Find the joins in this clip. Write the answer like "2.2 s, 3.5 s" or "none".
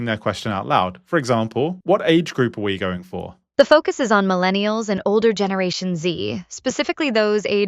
3.4 s